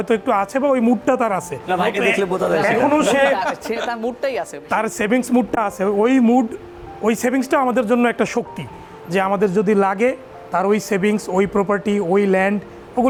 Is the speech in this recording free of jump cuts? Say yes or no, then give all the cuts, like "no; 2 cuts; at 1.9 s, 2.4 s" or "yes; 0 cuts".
yes; 0 cuts